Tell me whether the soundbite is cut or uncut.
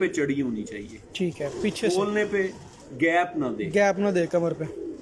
uncut